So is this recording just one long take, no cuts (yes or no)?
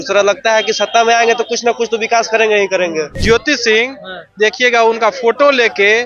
no